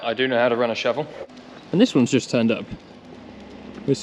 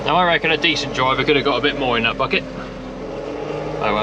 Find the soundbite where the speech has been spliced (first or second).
first